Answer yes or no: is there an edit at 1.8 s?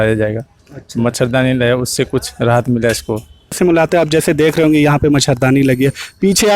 no